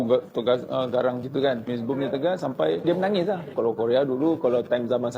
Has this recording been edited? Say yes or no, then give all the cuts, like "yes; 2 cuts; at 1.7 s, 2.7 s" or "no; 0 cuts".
yes; 2 cuts; at 1.7 s, 3.5 s